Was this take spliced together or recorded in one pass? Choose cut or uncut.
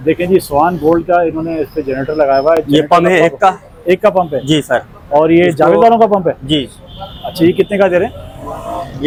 uncut